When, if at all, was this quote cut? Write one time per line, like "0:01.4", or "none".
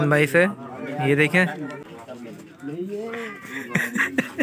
0:01.8